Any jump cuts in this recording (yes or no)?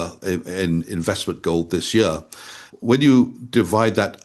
yes